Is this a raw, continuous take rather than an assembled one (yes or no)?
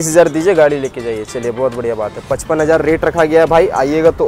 yes